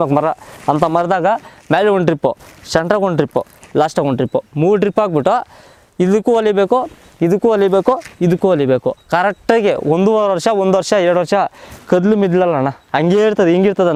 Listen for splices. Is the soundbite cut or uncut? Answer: uncut